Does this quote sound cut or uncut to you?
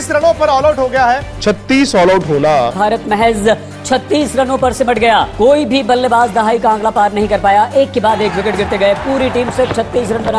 cut